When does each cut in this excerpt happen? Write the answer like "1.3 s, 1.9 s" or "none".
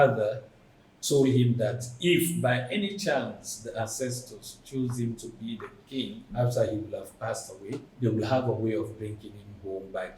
6.3 s, 7.9 s

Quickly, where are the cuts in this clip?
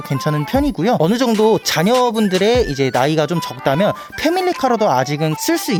none

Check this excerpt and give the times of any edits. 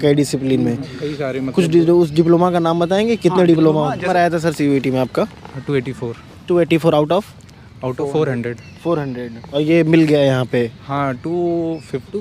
4.1 s

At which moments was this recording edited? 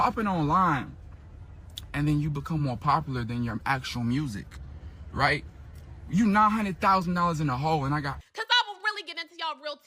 8.2 s

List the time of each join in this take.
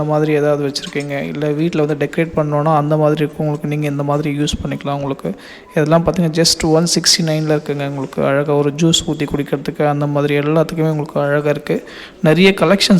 none

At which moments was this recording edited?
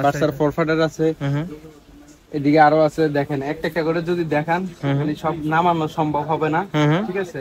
none

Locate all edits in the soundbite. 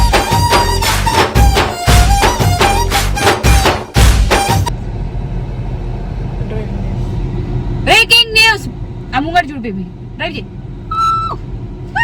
4.7 s

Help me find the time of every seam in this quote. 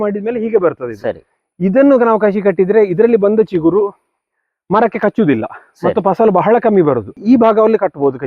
7.2 s

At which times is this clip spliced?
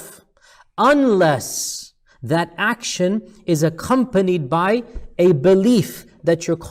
none

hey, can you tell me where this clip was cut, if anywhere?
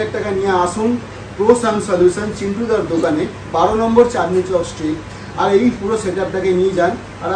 none

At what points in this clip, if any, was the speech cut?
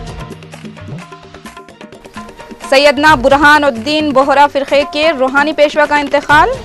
1.0 s

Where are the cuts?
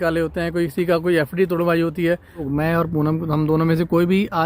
2.4 s

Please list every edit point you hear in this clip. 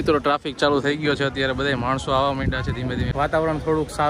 3.1 s

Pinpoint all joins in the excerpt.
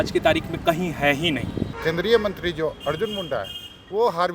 1.7 s

